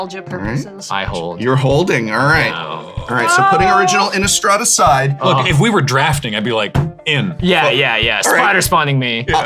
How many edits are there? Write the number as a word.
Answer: zero